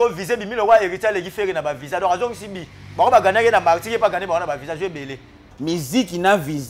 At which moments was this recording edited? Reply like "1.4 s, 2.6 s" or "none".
5.5 s